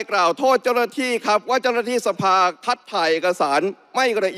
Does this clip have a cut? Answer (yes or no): no